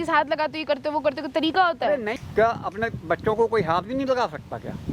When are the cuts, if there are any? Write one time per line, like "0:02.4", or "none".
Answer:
0:02.1